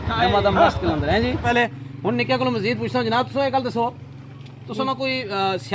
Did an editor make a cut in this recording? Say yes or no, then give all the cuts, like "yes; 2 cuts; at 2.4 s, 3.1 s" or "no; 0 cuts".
yes; 1 cut; at 1.5 s